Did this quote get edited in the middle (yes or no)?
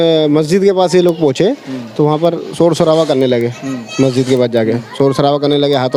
no